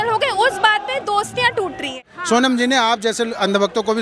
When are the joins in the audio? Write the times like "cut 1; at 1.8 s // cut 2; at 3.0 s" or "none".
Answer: cut 1; at 2.1 s